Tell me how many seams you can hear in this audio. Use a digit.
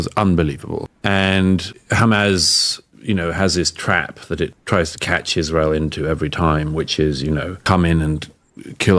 4